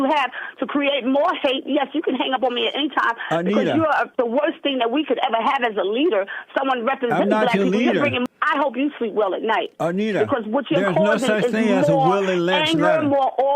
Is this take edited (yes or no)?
yes